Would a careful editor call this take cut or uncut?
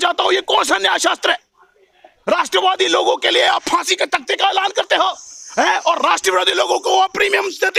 uncut